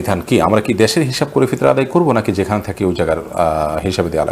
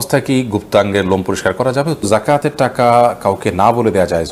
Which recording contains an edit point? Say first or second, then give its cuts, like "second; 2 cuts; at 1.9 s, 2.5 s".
second; 1 cut; at 2.0 s